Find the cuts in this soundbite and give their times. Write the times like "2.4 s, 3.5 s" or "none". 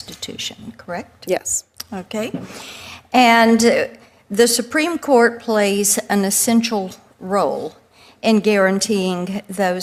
none